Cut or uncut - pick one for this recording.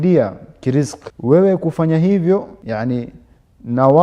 cut